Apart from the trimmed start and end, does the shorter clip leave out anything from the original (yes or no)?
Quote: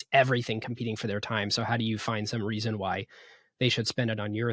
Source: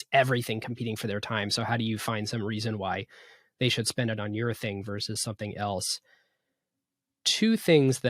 no